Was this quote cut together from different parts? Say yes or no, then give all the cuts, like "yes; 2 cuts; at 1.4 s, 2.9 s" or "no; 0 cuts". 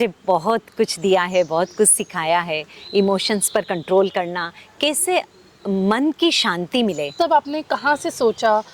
yes; 1 cut; at 7.1 s